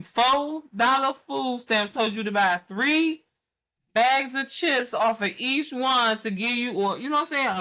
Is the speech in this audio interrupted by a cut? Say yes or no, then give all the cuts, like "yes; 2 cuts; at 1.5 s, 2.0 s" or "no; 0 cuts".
no; 0 cuts